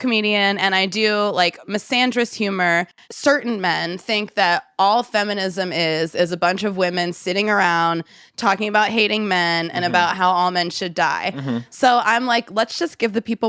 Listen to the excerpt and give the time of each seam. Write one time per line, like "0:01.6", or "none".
none